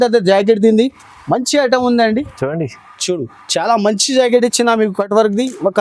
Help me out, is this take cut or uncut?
cut